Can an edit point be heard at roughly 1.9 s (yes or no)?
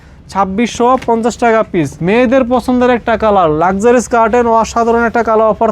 yes